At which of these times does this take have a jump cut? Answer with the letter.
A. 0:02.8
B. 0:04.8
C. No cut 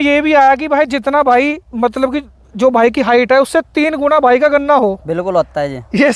C